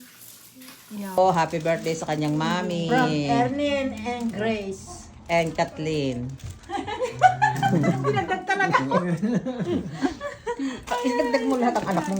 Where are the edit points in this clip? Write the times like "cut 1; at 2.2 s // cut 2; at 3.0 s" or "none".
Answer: cut 1; at 1.2 s